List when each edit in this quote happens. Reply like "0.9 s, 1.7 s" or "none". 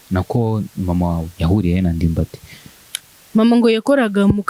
none